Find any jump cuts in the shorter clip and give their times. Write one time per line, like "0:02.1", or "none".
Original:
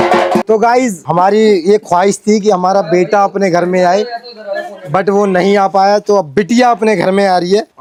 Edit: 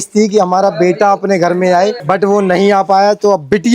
0:02.0